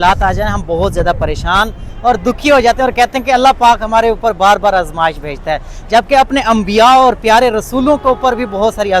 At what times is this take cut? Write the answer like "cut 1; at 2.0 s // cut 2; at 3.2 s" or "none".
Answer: none

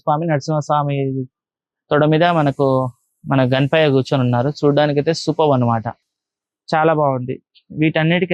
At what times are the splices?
none

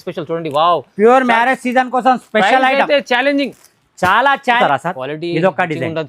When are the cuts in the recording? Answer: cut 1; at 4.6 s

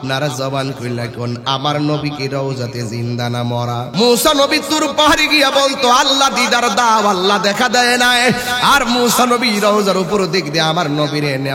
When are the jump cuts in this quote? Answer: cut 1; at 3.9 s

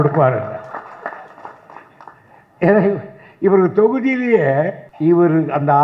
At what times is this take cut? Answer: cut 1; at 4.8 s

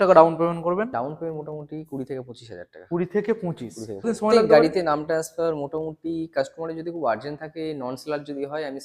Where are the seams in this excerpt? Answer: cut 1; at 0.9 s // cut 2; at 4.1 s

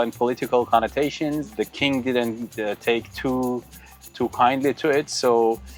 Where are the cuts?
none

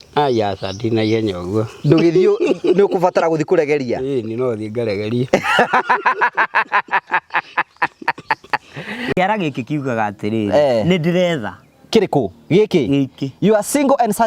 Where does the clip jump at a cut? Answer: cut 1; at 9.1 s

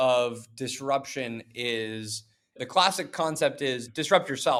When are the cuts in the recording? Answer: none

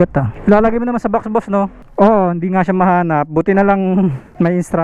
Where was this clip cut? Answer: cut 1; at 1.8 s

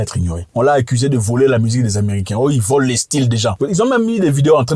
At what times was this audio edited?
none

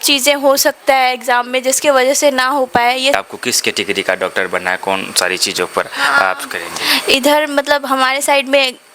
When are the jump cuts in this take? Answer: cut 1; at 3.1 s

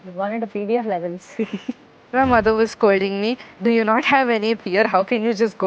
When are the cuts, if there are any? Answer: cut 1; at 2.0 s

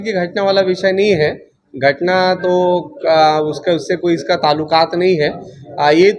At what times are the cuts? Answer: none

